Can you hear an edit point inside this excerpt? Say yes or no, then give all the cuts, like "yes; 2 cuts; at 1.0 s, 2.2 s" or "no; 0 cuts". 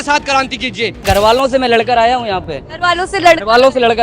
yes; 1 cut; at 1.0 s